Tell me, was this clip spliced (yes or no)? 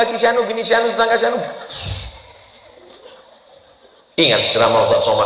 no